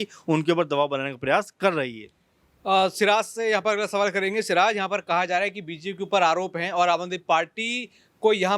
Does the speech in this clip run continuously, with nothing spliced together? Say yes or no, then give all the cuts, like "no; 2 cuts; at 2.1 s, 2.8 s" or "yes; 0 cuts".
yes; 0 cuts